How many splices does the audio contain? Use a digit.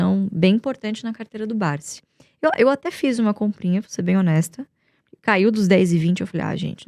0